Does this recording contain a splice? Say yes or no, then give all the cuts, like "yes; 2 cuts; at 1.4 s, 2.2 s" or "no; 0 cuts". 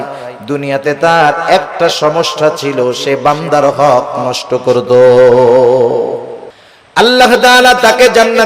yes; 1 cut; at 7.0 s